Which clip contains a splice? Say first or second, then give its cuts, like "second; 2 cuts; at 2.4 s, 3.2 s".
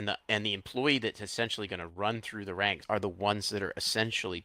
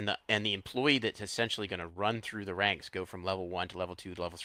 first; 1 cut; at 2.8 s